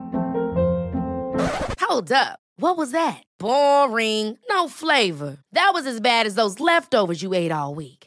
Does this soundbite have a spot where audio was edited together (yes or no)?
no